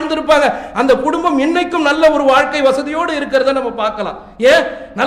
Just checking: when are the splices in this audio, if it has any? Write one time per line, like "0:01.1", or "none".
none